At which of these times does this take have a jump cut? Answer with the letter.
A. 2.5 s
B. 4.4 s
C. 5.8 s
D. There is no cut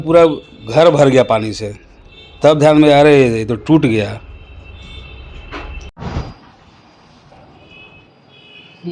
C